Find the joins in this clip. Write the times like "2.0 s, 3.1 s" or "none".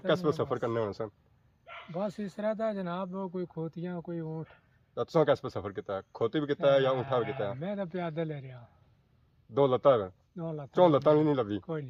none